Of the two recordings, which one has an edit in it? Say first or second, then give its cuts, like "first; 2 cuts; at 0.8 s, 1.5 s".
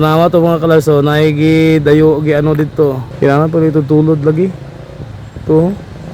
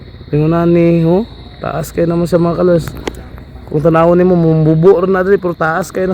first; 1 cut; at 3.1 s